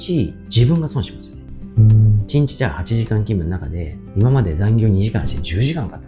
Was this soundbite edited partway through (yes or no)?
no